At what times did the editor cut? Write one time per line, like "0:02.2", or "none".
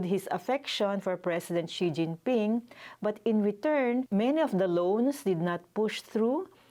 none